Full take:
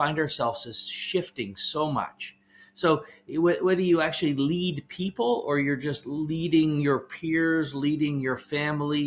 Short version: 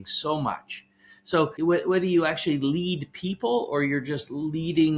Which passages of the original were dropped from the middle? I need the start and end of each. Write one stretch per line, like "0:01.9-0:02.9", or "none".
0:03.0-0:03.3